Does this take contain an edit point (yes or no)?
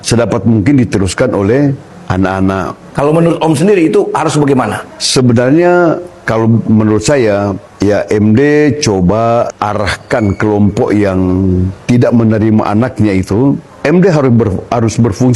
no